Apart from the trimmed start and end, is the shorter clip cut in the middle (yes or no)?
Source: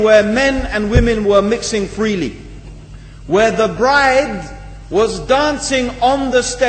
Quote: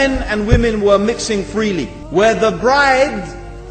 yes